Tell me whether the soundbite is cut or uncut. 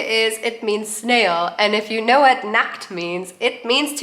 uncut